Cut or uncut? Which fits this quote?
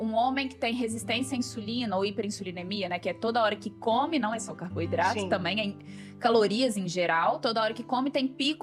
uncut